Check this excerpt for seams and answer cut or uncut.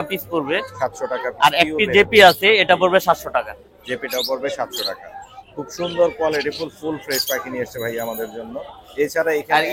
uncut